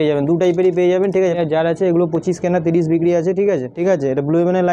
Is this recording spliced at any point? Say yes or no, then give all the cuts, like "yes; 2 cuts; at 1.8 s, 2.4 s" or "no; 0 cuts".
yes; 2 cuts; at 1.4 s, 3.7 s